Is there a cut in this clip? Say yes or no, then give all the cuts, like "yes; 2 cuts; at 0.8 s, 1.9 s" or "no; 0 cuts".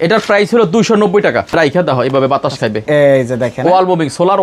yes; 1 cut; at 1.5 s